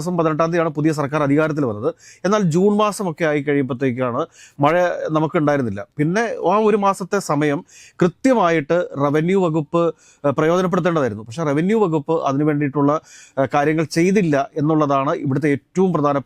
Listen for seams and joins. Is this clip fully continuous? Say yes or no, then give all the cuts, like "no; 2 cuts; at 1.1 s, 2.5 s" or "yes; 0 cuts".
yes; 0 cuts